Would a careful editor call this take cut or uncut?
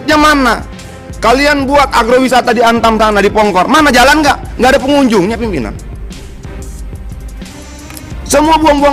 uncut